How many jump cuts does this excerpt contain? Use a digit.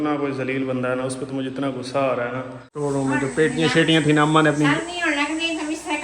1